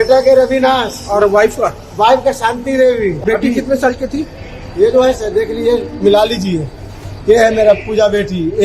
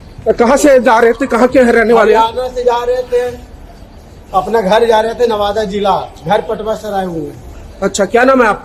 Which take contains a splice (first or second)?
first